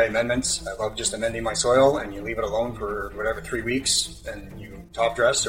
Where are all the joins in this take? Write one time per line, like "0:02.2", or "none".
none

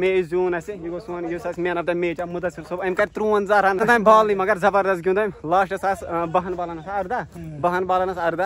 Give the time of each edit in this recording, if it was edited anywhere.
0:03.8

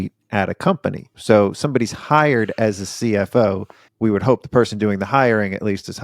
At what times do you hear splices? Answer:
0:01.1

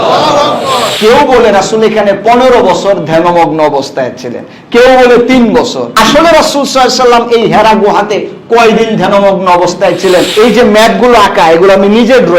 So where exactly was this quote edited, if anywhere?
0:00.9
0:05.8
0:10.3

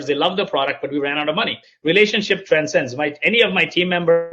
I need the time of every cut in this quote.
0:01.6

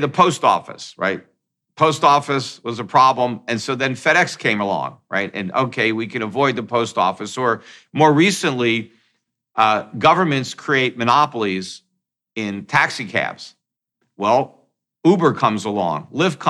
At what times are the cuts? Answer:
none

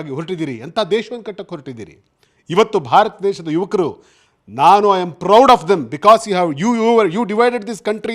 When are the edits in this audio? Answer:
none

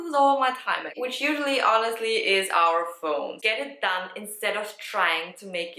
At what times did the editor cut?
0:03.4

